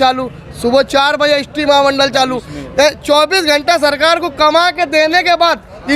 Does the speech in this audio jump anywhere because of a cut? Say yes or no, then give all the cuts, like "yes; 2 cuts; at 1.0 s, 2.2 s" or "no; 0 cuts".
no; 0 cuts